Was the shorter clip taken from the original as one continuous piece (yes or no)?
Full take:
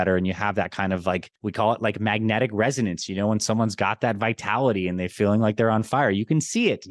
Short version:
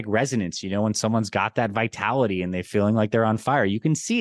yes